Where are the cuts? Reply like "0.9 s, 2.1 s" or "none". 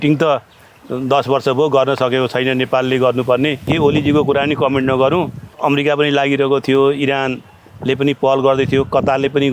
3.7 s, 5.4 s